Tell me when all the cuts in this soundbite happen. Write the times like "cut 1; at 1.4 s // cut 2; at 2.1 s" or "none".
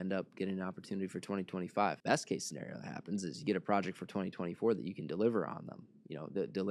cut 1; at 2.0 s